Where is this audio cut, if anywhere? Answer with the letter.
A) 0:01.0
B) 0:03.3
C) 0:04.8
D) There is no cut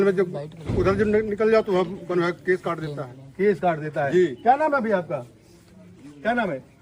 D